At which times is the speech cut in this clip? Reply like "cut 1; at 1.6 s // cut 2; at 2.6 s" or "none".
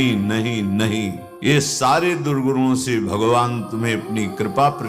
cut 1; at 1.5 s